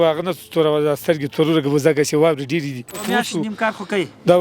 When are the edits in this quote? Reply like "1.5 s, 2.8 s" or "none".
3.0 s

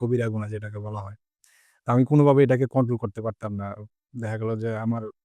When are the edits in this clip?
none

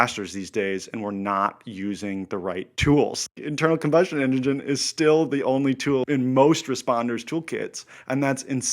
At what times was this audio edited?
3.2 s, 6.0 s

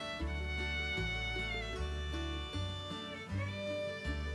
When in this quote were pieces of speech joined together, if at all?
none

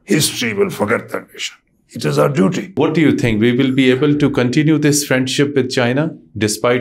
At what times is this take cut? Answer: 2.8 s

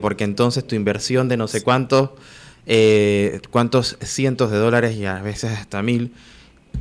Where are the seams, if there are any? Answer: none

